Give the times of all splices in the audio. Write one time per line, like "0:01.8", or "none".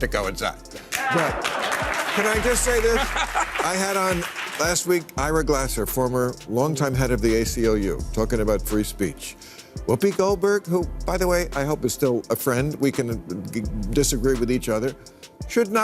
none